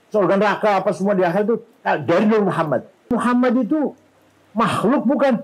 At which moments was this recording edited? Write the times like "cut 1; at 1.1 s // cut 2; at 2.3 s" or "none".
cut 1; at 3.1 s